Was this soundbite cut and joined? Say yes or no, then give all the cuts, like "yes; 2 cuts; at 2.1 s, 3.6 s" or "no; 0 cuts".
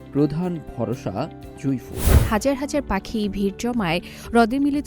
yes; 1 cut; at 2.1 s